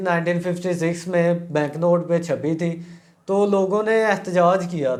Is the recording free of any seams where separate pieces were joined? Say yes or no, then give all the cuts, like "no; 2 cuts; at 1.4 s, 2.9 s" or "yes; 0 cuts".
yes; 0 cuts